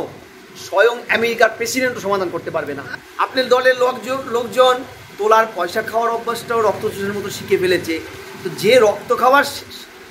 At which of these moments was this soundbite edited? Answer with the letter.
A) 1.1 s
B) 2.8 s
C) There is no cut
B